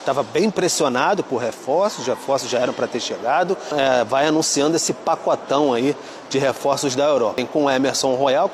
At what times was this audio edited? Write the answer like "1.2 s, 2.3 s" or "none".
3.7 s, 7.4 s